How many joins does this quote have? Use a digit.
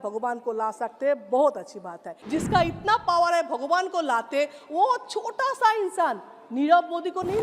1